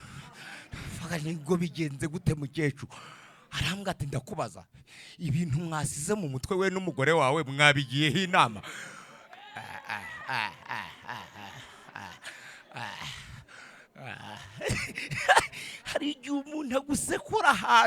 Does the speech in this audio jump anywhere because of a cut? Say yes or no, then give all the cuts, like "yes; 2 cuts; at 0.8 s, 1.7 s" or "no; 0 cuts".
no; 0 cuts